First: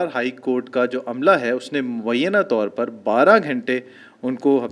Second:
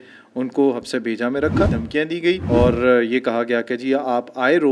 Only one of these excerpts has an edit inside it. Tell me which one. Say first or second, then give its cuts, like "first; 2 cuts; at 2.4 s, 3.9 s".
second; 1 cut; at 2.0 s